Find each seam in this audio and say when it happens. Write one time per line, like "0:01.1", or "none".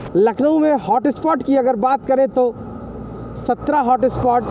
none